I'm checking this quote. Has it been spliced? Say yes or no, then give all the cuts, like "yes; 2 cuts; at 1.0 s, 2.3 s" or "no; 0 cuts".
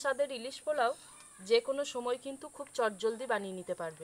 no; 0 cuts